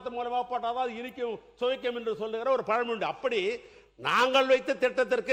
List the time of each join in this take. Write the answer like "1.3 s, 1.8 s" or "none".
none